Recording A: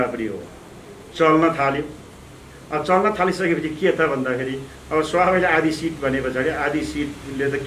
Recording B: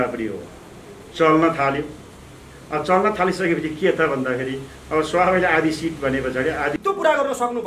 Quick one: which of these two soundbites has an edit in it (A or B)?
B